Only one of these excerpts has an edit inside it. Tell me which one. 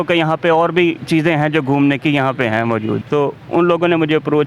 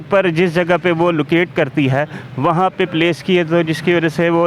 first; 1 cut; at 3.0 s

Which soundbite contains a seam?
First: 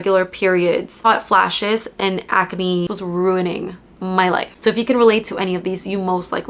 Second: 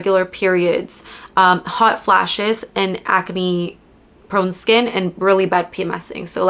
first; 2 cuts; at 0.9 s, 2.9 s

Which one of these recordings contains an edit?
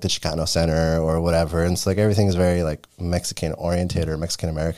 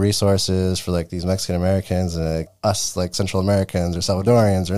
second; 1 cut; at 2.5 s

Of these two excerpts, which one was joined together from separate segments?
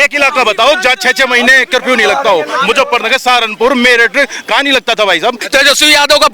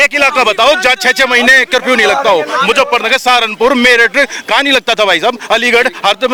first; 1 cut; at 5.4 s

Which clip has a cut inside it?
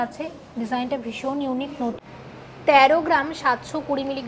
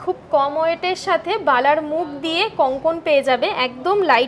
first; 1 cut; at 2.1 s

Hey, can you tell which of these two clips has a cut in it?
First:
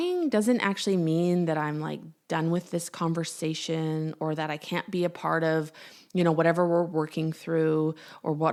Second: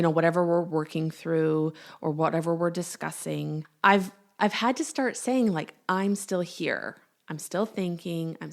second; 1 cut; at 3.7 s

